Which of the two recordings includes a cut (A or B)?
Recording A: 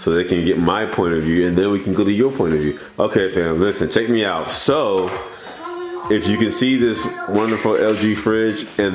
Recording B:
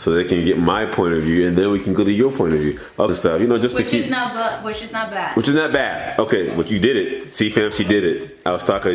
B